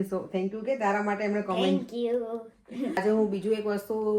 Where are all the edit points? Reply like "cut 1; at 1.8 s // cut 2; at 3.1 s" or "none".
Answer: cut 1; at 3.0 s